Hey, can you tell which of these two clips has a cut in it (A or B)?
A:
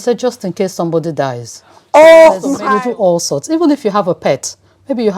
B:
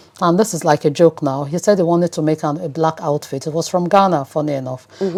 A